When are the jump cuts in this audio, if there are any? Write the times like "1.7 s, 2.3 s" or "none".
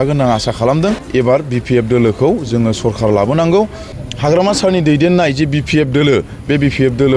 1.0 s, 3.9 s